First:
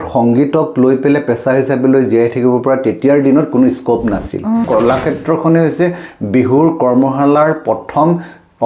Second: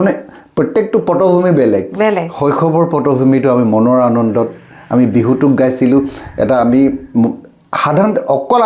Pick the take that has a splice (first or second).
first